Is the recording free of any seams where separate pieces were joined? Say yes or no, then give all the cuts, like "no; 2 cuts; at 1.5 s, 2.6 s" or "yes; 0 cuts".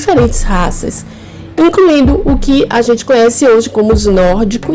yes; 0 cuts